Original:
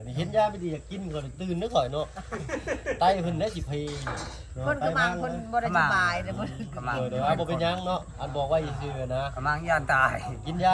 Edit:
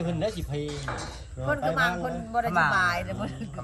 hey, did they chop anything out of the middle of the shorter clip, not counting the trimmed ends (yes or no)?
no